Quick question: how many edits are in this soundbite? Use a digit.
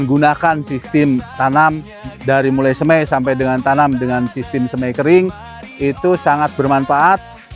1